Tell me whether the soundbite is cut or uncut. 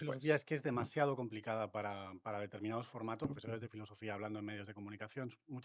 cut